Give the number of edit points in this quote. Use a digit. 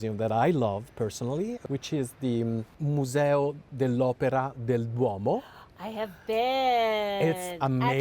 2